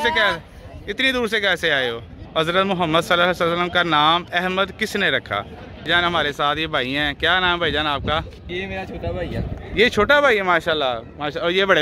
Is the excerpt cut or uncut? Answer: cut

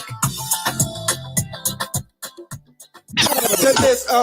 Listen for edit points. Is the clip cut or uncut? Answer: cut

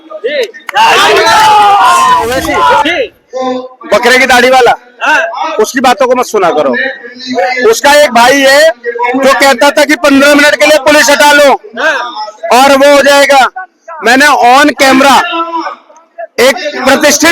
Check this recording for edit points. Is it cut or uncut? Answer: cut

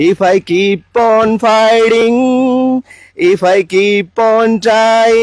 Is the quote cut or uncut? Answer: uncut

